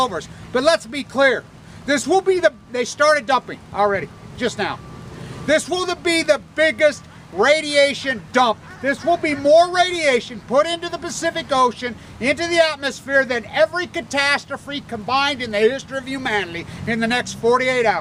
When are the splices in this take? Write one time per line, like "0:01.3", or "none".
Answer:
none

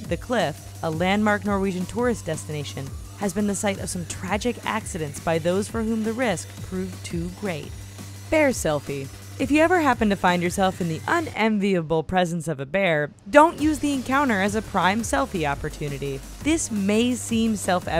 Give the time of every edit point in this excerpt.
0:15.6

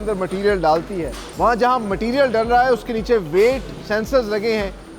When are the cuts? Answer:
0:01.2

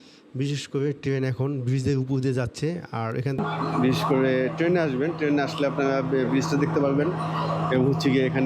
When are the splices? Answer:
0:03.4

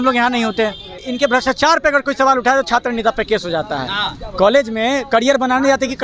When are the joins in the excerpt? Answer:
0:01.1

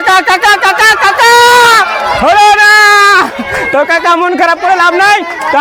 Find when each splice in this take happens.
none

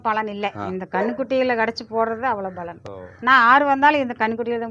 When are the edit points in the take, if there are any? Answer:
none

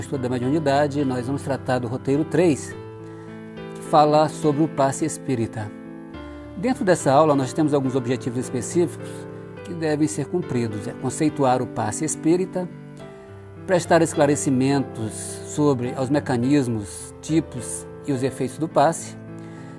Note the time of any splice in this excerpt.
0:05.2

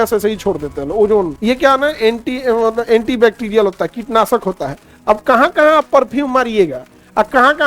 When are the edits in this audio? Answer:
0:01.3

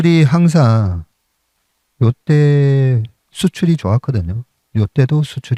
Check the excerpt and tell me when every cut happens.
none

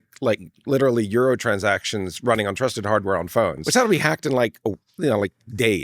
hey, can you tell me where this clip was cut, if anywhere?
0:03.6

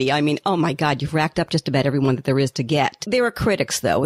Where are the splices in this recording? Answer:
0:03.0

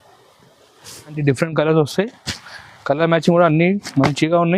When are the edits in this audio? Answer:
0:01.2

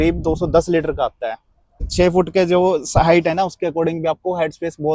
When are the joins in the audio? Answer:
0:01.8

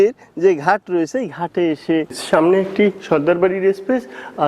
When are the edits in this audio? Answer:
0:02.2

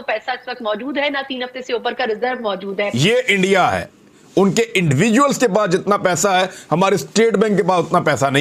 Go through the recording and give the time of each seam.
0:02.9

